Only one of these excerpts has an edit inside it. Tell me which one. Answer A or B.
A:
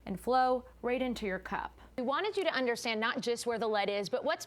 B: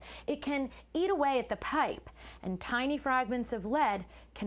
A